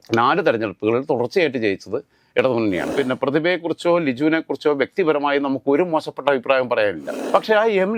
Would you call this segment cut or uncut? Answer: cut